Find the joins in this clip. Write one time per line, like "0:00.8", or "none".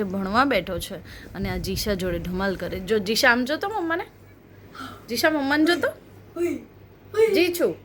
none

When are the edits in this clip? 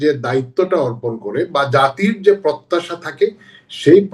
none

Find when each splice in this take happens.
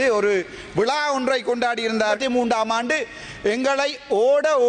0:02.2

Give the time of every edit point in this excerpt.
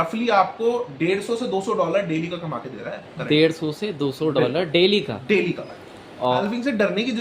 0:06.3

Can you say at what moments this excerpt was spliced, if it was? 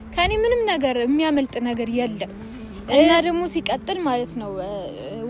0:03.0

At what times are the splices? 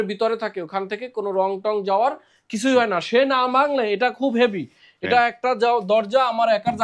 none

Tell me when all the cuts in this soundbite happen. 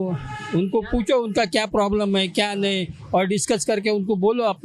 none

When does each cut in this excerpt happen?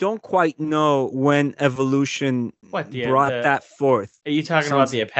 0:01.1
0:02.6
0:04.1

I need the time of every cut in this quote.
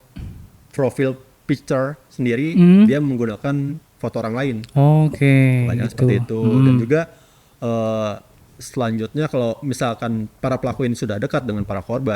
none

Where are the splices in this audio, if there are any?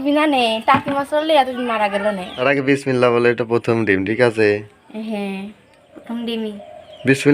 0:02.4

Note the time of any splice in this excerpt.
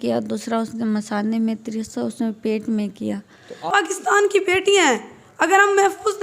0:03.7

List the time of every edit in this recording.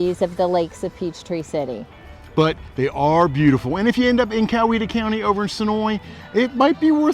none

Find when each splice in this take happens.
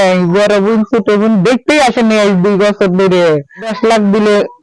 0:03.7

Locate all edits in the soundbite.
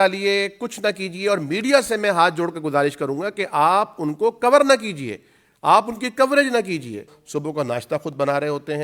0:07.2

